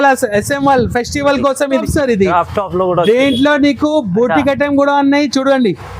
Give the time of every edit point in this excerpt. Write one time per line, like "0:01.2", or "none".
0:01.7